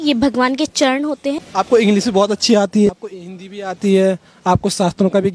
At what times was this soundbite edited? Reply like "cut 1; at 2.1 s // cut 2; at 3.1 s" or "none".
cut 1; at 1.4 s // cut 2; at 2.9 s